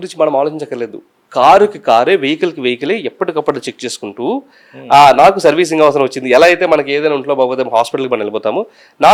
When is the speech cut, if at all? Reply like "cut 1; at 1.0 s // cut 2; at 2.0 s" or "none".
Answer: none